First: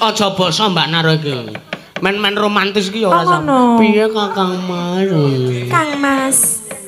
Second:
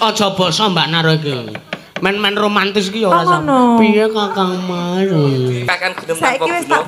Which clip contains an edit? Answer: second; 1 cut; at 5.6 s

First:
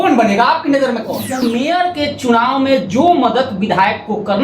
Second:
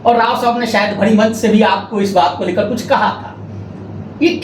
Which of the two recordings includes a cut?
first; 1 cut; at 1.4 s

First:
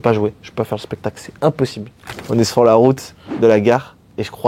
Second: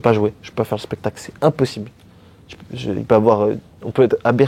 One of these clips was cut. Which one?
first; 1 cut; at 2.2 s

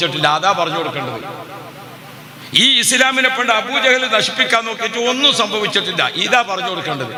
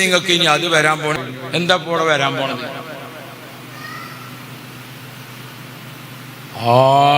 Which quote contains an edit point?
second; 1 cut; at 1.2 s

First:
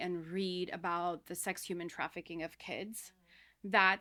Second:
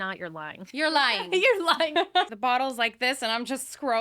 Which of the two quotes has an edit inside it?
second; 1 cut; at 2.3 s

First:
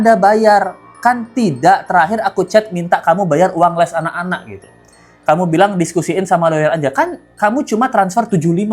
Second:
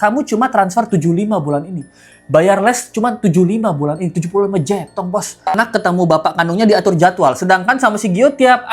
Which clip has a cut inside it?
second; 1 cut; at 5.6 s

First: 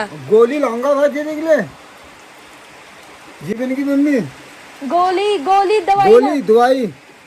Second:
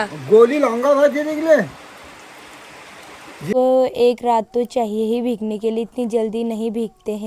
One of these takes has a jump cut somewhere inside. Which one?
second; 1 cut; at 3.5 s

